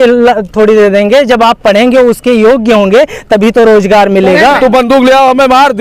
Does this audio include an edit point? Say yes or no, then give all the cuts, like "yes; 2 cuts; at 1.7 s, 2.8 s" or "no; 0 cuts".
yes; 1 cut; at 4.4 s